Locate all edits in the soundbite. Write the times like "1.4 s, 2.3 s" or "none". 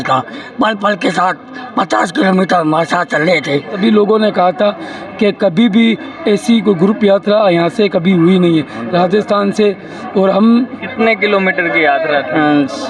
3.7 s, 10.8 s